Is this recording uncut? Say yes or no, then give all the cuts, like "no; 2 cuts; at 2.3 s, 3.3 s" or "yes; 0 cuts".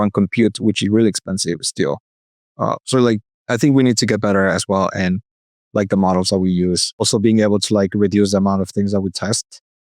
no; 1 cut; at 7.0 s